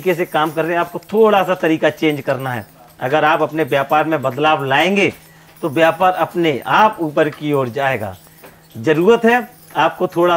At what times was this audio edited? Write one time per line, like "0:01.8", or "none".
none